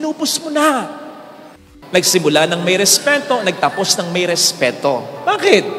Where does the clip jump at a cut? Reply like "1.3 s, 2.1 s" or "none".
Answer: 1.5 s